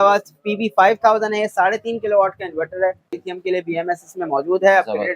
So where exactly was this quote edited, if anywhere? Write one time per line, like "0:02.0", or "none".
0:03.1